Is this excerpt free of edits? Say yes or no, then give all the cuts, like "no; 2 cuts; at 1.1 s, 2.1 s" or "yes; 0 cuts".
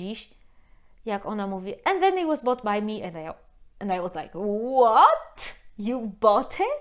yes; 0 cuts